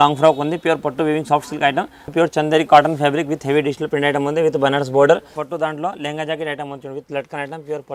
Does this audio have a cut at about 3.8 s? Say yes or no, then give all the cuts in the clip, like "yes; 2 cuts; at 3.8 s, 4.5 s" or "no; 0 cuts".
no; 2 cuts; at 2.1 s, 5.4 s